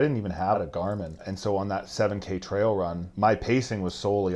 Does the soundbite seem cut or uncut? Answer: cut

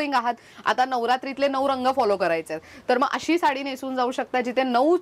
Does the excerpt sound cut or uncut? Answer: uncut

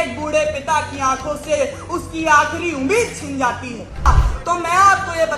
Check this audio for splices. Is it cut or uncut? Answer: cut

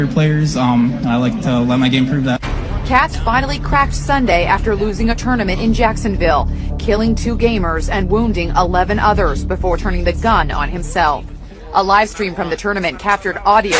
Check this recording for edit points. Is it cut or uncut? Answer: cut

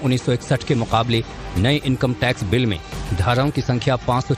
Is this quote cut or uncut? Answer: uncut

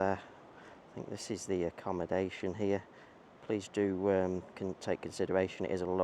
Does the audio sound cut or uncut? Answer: uncut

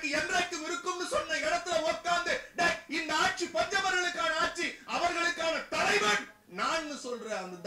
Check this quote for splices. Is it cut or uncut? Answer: uncut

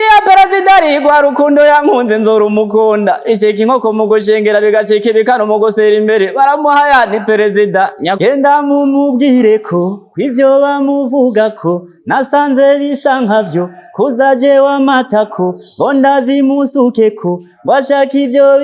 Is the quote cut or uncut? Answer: cut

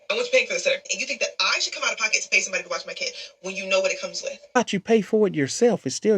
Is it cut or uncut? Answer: cut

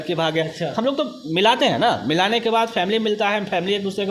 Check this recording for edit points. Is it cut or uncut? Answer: uncut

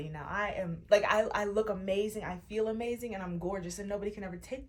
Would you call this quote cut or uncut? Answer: uncut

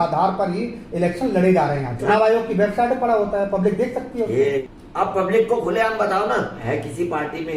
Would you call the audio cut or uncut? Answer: cut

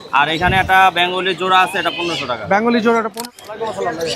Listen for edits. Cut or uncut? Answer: cut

